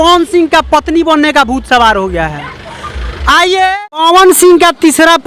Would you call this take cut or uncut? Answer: cut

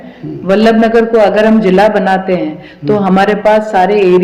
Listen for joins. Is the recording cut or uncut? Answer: uncut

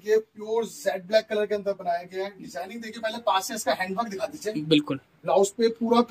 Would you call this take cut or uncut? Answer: uncut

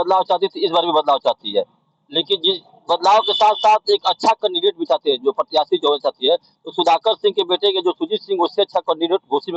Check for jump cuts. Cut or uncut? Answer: uncut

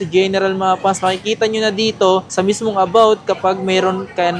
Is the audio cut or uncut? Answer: uncut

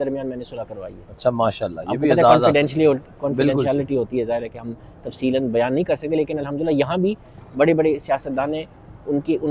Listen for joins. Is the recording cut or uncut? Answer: uncut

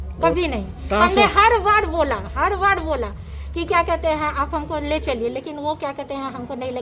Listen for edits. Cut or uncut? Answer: uncut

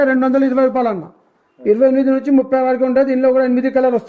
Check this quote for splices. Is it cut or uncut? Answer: uncut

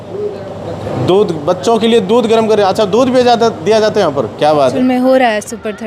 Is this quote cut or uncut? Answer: cut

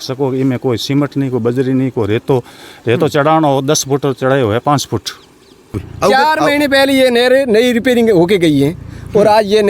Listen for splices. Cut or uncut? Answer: cut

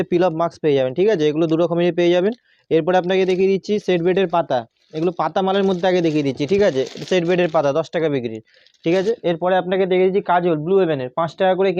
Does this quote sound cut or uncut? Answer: uncut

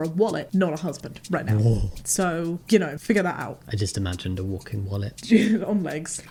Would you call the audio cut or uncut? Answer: uncut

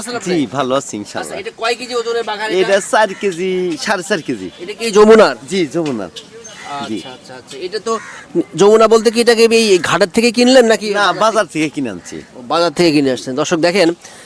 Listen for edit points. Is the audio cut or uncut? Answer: uncut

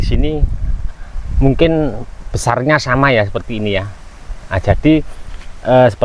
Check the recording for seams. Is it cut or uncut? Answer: uncut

